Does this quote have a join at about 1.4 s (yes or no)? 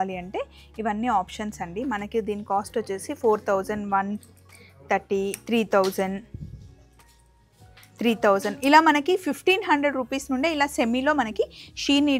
no